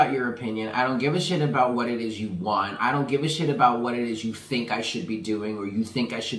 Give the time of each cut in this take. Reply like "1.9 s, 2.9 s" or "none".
none